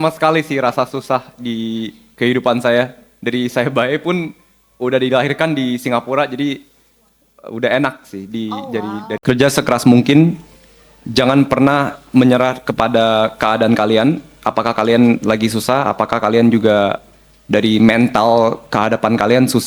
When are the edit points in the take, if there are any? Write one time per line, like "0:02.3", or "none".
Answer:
0:09.2